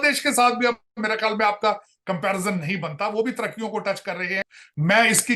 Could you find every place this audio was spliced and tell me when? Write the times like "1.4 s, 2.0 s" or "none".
4.4 s